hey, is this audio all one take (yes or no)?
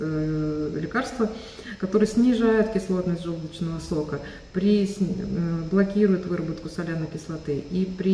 yes